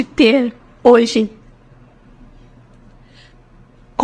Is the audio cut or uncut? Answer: uncut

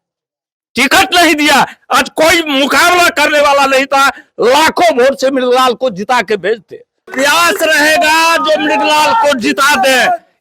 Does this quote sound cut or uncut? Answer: cut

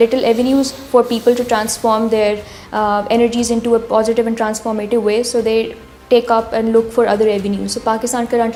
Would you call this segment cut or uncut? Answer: uncut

